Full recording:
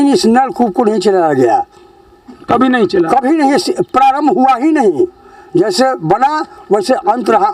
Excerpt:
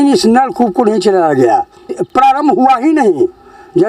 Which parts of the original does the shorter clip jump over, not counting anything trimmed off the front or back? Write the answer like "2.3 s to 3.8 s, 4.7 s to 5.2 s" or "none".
2.0 s to 3.8 s